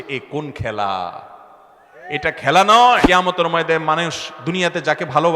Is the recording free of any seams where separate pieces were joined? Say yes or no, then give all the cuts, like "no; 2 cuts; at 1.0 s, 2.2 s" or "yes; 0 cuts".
no; 1 cut; at 3.0 s